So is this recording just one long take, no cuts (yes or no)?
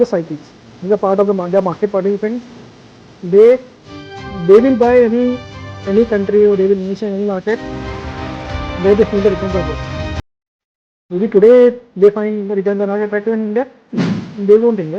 yes